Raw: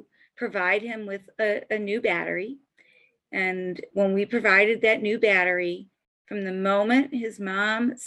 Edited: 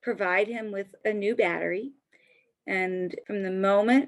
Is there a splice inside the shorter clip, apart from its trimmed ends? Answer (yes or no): yes